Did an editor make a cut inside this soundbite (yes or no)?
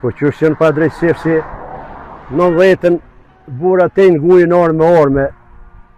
no